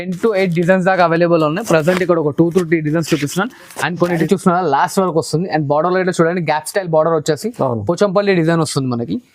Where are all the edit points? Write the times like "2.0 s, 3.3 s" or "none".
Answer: 4.2 s

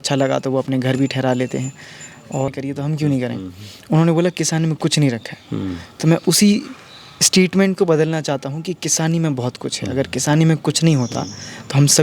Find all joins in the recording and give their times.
2.5 s

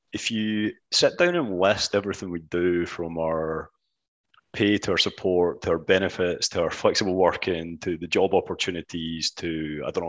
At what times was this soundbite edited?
none

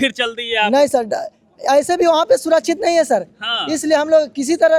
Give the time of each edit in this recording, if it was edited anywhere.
none

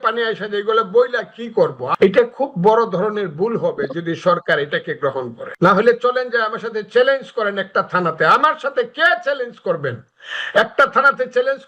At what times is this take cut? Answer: 1.8 s, 5.4 s

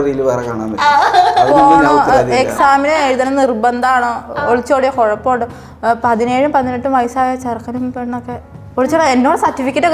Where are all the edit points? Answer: none

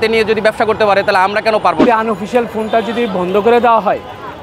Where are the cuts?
1.8 s

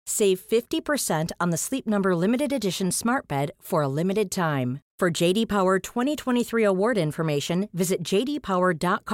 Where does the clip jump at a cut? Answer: none

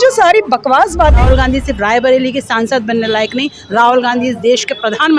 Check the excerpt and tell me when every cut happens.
1.2 s

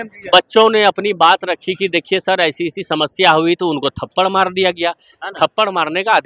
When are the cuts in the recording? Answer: none

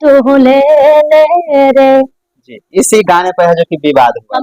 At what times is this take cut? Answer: none

